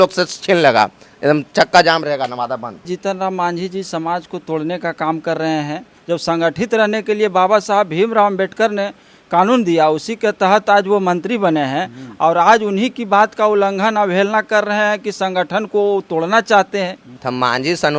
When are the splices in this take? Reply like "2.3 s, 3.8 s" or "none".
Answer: 2.9 s, 5.9 s, 17.1 s